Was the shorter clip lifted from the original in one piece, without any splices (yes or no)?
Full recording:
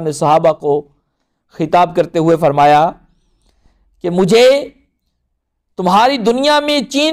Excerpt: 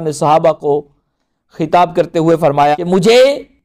no